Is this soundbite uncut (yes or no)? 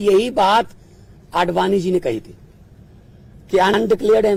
yes